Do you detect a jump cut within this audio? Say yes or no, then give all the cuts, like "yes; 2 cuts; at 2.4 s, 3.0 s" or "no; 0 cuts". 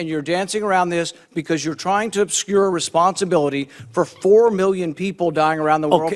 no; 0 cuts